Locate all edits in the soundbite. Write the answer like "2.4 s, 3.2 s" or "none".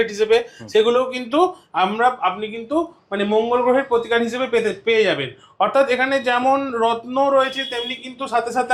none